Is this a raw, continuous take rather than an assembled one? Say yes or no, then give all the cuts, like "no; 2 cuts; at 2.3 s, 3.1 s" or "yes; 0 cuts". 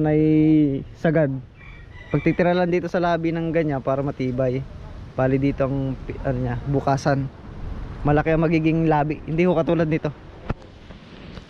yes; 0 cuts